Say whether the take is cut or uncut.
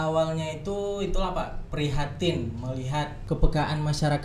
cut